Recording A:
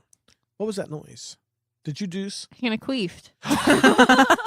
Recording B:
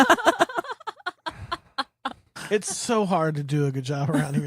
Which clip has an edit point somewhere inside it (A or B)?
B